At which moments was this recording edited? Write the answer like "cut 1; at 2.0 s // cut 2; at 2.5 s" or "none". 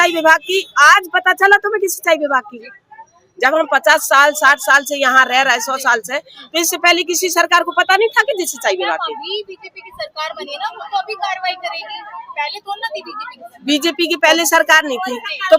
none

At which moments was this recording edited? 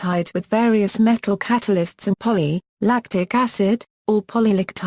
none

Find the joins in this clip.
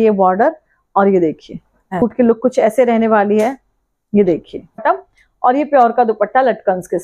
cut 1; at 2.0 s // cut 2; at 4.8 s

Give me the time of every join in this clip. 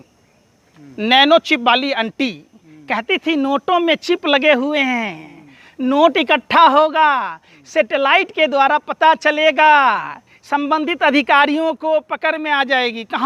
none

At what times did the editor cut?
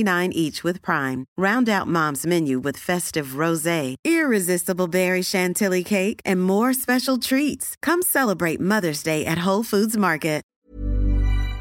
cut 1; at 10.6 s

